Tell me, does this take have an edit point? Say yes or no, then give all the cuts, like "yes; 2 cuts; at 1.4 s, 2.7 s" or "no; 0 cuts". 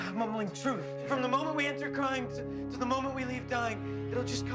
yes; 1 cut; at 0.9 s